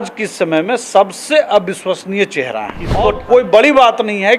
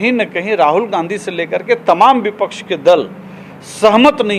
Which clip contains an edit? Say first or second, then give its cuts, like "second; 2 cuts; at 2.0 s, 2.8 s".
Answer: first; 1 cut; at 3.2 s